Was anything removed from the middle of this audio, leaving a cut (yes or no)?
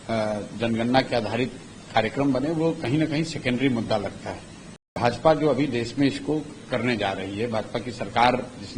yes